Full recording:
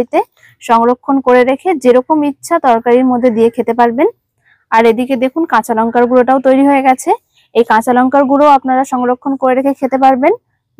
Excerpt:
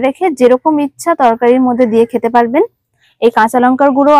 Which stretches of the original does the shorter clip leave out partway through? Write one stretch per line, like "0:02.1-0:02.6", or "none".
0:04.5-0:07.3